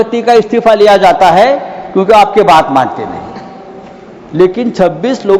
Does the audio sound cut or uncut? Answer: uncut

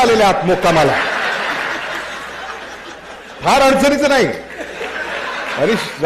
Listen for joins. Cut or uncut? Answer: uncut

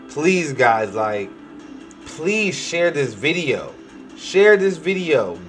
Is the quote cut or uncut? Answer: uncut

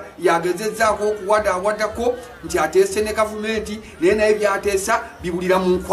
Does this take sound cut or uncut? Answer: uncut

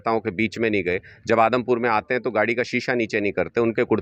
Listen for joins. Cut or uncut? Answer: uncut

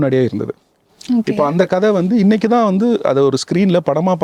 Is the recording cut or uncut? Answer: uncut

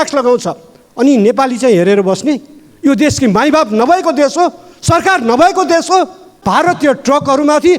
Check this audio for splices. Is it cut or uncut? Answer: cut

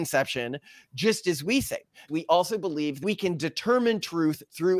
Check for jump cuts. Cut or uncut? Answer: cut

